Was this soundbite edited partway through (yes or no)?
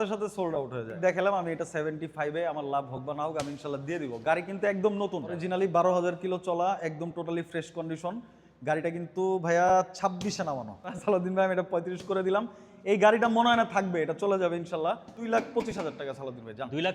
yes